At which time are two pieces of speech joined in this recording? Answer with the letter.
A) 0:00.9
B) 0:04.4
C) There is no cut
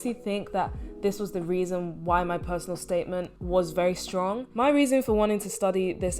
B